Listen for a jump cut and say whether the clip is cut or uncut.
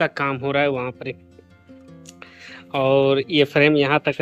uncut